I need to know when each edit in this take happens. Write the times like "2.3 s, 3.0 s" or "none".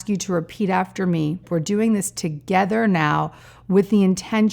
1.4 s